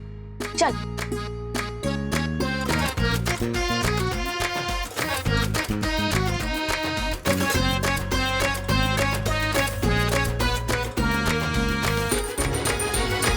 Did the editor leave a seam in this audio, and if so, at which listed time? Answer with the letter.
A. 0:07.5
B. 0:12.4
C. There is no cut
B